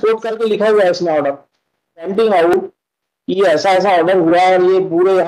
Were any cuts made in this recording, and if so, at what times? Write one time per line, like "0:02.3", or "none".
0:02.1